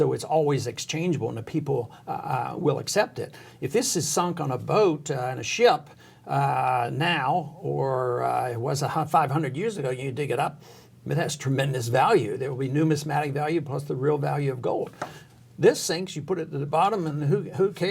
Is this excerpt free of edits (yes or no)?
yes